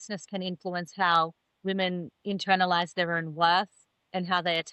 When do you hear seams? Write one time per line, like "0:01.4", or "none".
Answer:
none